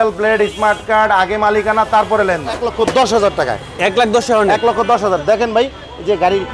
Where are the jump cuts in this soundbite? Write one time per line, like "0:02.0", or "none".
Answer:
0:02.6